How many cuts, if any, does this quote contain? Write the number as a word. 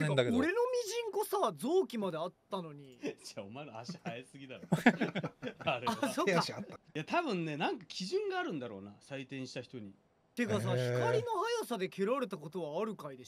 zero